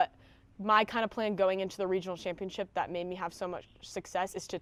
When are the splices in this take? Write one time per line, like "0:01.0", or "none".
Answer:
none